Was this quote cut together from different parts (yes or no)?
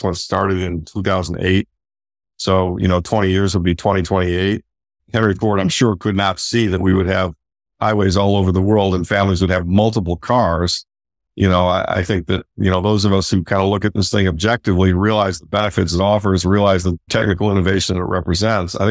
yes